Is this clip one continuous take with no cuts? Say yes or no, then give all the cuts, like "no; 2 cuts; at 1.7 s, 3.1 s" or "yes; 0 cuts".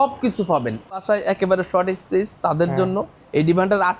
no; 1 cut; at 1.0 s